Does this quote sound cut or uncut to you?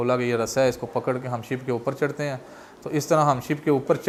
uncut